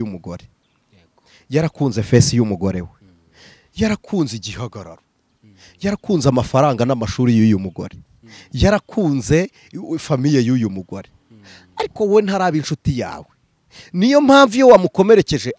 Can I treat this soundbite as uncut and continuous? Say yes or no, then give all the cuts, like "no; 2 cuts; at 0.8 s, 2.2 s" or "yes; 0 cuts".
yes; 0 cuts